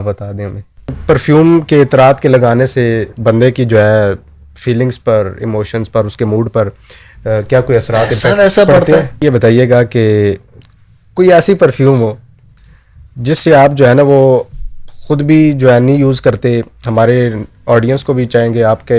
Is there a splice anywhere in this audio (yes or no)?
yes